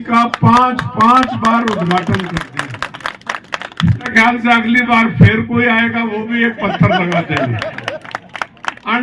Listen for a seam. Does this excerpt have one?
yes; 1 cut; at 4.1 s

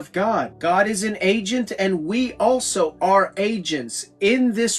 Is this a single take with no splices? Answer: yes; 0 cuts

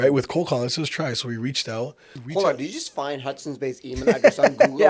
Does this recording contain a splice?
yes; 1 cut; at 2.1 s

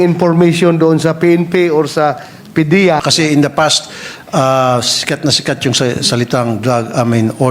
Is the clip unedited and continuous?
no; 1 cut; at 3.1 s

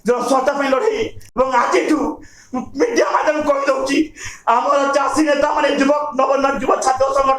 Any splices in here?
yes; 1 cut; at 1.2 s

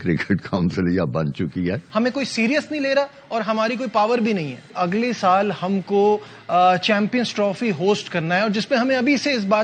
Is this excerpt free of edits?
no; 2 cuts; at 1.8 s, 4.7 s

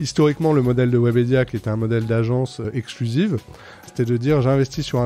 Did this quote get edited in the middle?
yes; 2 cuts; at 2.7 s, 3.9 s

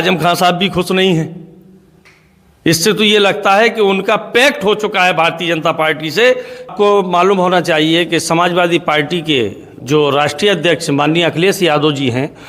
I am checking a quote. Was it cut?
yes; 1 cut; at 6.7 s

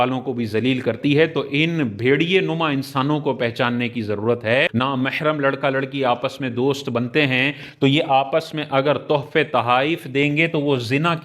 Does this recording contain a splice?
yes; 1 cut; at 4.7 s

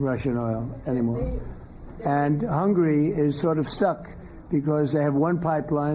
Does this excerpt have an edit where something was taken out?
yes; 1 cut; at 2.0 s

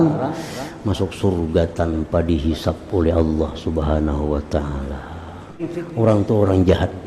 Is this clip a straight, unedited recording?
no; 1 cut; at 5.6 s

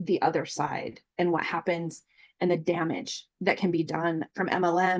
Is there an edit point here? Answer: no; 0 cuts

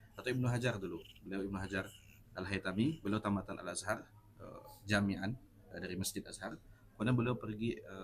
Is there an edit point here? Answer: no; 0 cuts

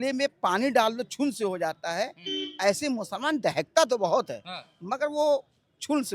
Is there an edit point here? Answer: no; 0 cuts

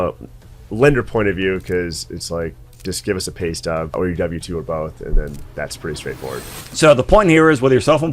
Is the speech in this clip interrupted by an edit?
yes; 2 cuts; at 3.9 s, 6.6 s

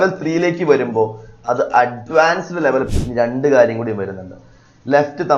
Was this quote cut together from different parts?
yes; 1 cut; at 2.9 s

